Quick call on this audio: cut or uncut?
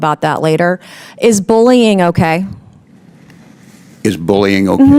uncut